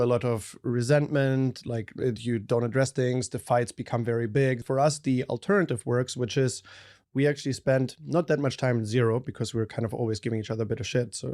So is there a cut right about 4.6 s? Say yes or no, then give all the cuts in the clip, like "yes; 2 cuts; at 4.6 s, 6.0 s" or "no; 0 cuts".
yes; 1 cut; at 4.6 s